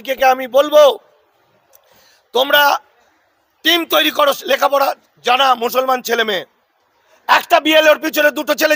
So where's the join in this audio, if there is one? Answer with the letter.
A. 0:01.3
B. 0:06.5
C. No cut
C